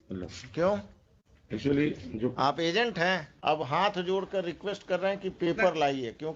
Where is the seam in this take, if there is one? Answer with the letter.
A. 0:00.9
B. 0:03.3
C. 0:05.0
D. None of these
B